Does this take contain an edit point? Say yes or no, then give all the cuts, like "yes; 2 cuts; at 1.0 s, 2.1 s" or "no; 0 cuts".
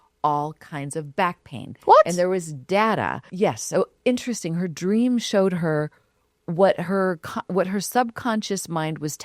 yes; 1 cut; at 3.2 s